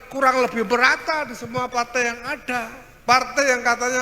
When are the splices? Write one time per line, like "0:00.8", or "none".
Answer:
0:02.8